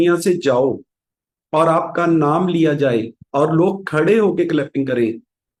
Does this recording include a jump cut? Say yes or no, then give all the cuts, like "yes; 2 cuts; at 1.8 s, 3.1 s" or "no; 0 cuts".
no; 0 cuts